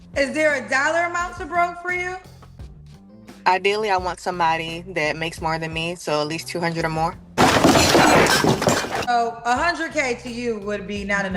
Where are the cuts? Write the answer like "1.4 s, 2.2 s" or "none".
7.4 s, 9.1 s